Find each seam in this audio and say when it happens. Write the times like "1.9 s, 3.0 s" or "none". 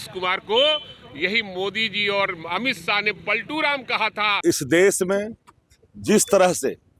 4.3 s